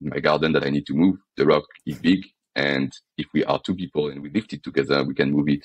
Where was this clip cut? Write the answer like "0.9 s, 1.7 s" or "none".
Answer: none

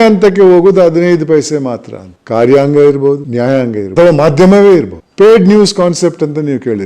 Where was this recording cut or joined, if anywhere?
2.1 s

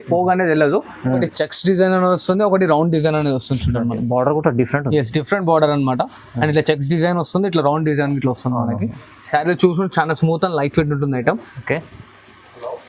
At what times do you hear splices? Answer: 1.2 s

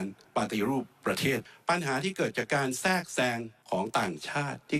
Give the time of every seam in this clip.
1.5 s, 3.5 s

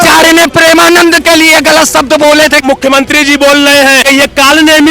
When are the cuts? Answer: 2.6 s, 4.0 s

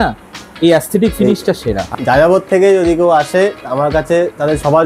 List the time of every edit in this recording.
1.8 s

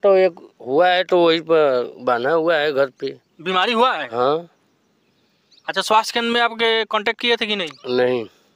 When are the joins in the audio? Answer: none

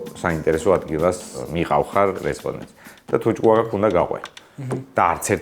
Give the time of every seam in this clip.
1.4 s

